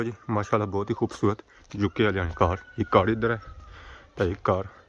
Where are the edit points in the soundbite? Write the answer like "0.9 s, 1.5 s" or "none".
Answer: none

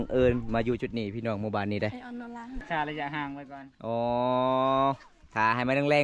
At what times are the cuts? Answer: 2.6 s

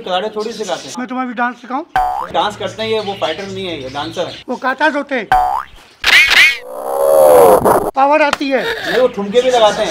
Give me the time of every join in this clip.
0.9 s, 2.3 s, 4.4 s

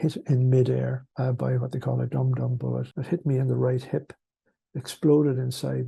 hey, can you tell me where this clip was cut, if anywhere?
1.0 s, 2.9 s

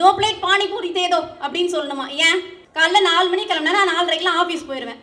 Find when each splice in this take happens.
2.6 s

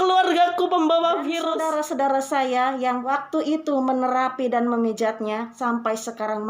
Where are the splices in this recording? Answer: 1.5 s, 3.0 s, 5.5 s

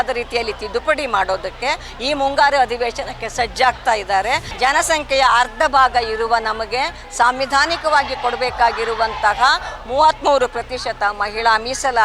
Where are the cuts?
4.5 s

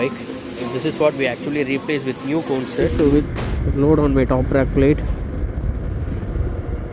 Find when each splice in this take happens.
2.9 s

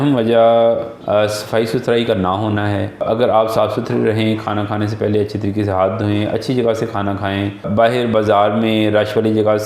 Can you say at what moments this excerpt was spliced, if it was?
none

